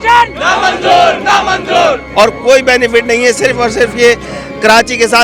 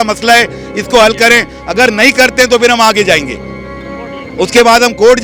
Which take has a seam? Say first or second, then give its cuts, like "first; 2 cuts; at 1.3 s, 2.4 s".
first; 1 cut; at 2.0 s